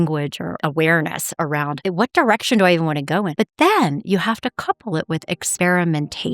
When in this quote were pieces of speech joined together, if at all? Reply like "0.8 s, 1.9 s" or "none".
5.4 s